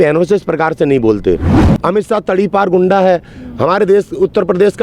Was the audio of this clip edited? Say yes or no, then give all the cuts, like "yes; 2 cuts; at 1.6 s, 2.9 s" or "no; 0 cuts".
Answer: yes; 1 cut; at 1.6 s